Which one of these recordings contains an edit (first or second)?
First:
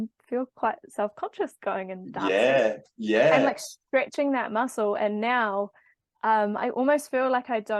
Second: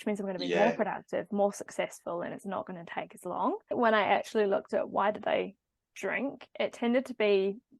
second